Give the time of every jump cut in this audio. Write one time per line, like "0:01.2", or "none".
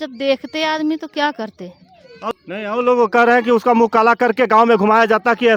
none